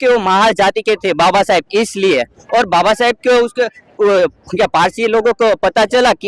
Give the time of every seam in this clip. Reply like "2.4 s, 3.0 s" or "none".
none